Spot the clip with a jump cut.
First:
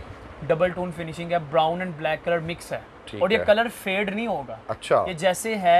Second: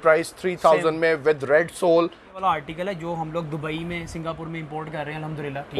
second; 1 cut; at 2.3 s

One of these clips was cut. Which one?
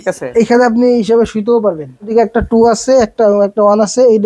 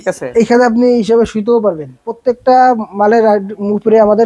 second; 1 cut; at 2.0 s

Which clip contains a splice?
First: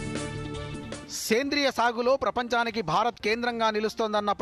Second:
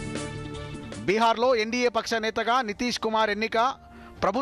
second; 1 cut; at 1.0 s

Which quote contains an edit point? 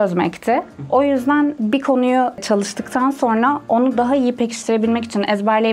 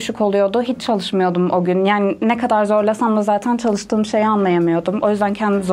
first; 2 cuts; at 1.6 s, 2.4 s

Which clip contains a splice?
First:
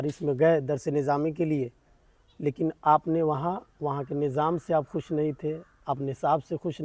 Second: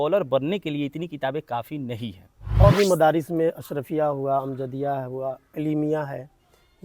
second; 1 cut; at 2.4 s

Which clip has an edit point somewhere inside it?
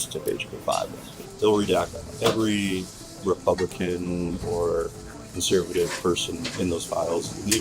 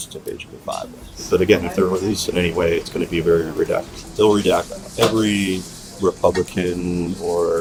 first; 1 cut; at 1.2 s

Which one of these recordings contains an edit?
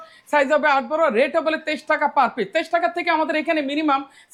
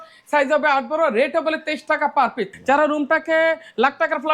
second; 1 cut; at 2.5 s

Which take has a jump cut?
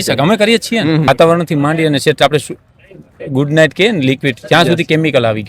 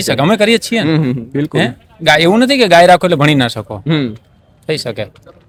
first; 1 cut; at 1.1 s

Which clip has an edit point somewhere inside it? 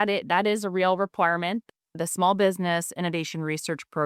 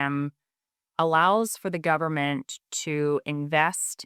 first; 1 cut; at 1.6 s

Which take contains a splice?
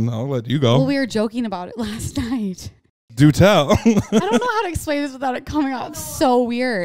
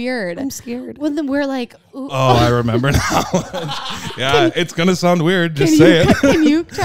first; 2 cuts; at 3.2 s, 4.1 s

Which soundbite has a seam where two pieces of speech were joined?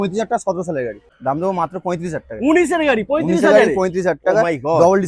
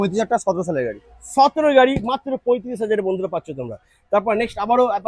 first; 1 cut; at 1.1 s

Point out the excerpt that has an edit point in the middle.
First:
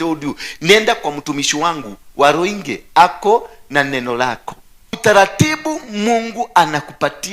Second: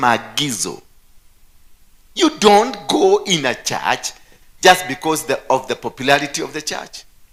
first; 1 cut; at 4.9 s

